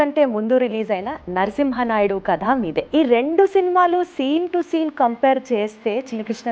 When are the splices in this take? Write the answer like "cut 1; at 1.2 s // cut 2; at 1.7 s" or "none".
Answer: cut 1; at 2.9 s